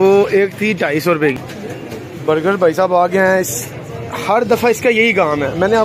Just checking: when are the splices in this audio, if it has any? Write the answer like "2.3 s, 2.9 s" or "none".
1.4 s